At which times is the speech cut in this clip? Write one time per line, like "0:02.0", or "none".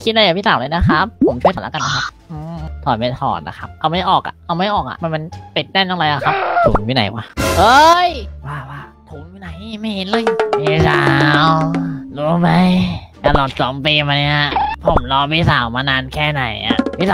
0:01.6
0:10.2